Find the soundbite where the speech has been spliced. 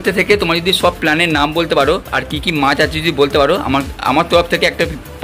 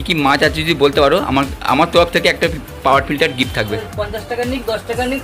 second; 1 cut; at 3.8 s

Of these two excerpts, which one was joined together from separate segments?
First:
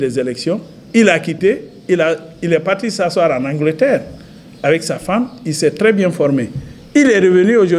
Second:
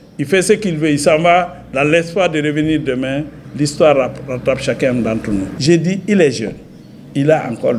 second; 1 cut; at 5.5 s

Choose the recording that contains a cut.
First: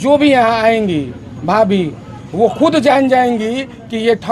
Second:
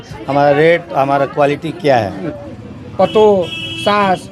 second; 1 cut; at 2.3 s

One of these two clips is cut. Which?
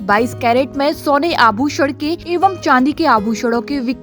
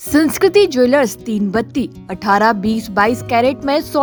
first; 1 cut; at 2.2 s

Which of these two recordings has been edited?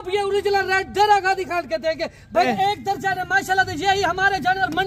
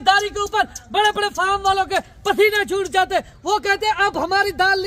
first; 1 cut; at 2.5 s

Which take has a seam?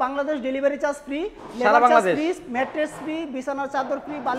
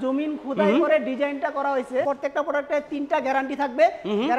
second; 1 cut; at 2.0 s

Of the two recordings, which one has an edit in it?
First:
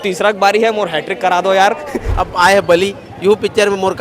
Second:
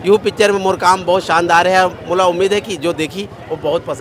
first; 1 cut; at 2.0 s

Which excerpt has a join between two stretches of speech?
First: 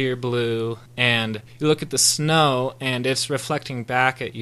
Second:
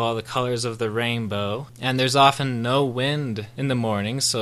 second; 2 cuts; at 1.7 s, 3.5 s

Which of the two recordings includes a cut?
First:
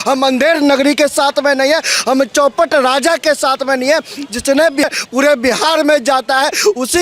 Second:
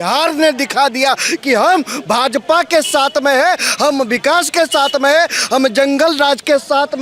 first; 1 cut; at 4.8 s

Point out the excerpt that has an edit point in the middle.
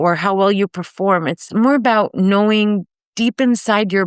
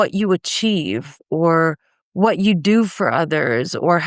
first; 1 cut; at 1.4 s

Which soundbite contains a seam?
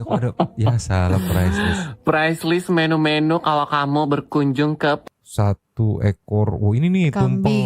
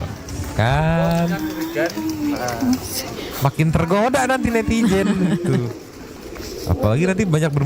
first; 1 cut; at 5.0 s

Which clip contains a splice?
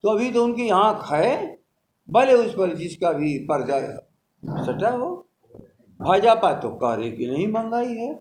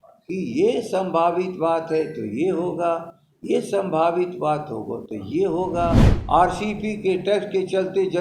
second; 1 cut; at 6.1 s

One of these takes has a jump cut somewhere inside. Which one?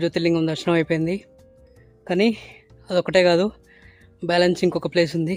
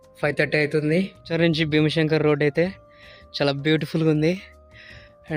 second; 1 cut; at 1.3 s

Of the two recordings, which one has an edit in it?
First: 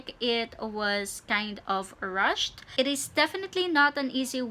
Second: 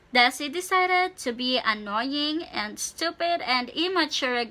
first; 1 cut; at 2.6 s

